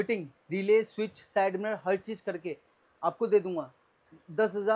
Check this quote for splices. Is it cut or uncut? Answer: uncut